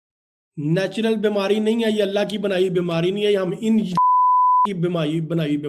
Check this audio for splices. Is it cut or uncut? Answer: uncut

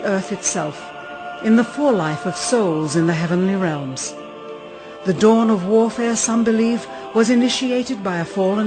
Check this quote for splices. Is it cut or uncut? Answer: cut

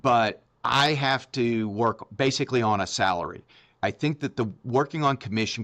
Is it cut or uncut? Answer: uncut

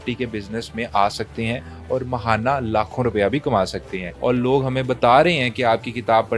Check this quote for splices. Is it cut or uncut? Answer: cut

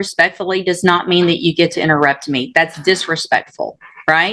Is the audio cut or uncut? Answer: uncut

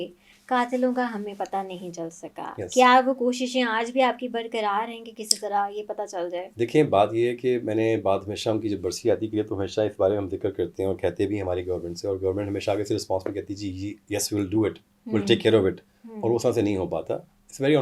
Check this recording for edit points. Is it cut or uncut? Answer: uncut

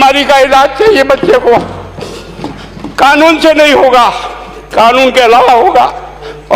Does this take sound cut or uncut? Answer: uncut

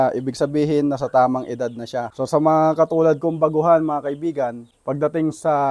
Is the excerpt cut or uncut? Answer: uncut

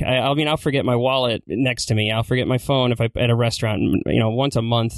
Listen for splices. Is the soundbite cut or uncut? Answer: cut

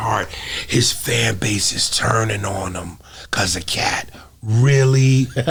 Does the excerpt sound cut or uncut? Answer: uncut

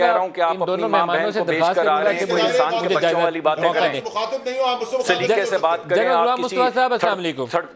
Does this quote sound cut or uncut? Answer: uncut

